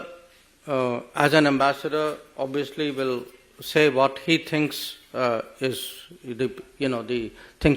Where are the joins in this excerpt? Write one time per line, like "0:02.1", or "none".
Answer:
none

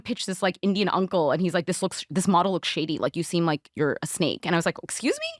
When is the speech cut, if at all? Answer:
none

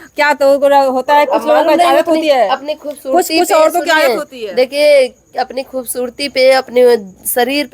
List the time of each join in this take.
none

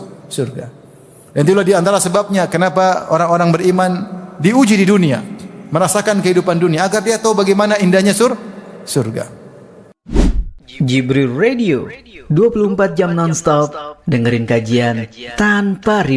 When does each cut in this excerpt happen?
0:10.0

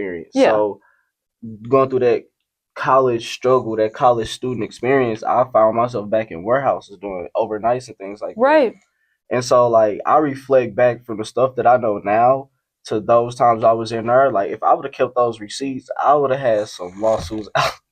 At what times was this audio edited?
none

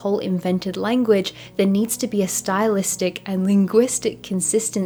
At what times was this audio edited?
none

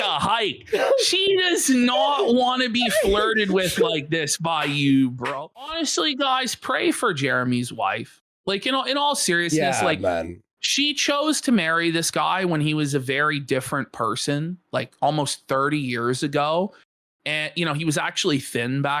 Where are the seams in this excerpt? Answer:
0:05.6

